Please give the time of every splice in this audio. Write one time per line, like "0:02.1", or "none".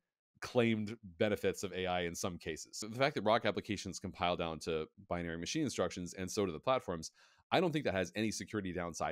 0:02.7